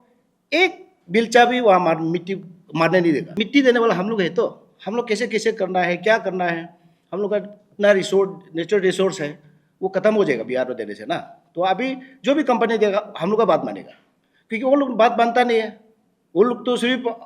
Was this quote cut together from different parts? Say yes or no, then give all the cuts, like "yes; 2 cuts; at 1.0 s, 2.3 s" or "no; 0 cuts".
yes; 1 cut; at 3.3 s